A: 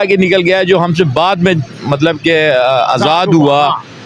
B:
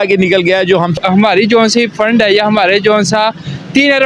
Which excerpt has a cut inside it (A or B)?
B